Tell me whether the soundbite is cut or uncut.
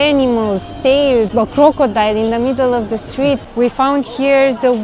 cut